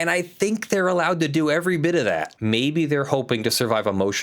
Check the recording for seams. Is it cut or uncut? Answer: cut